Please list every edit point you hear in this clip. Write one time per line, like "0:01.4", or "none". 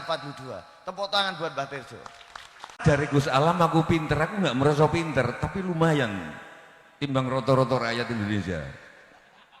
0:02.8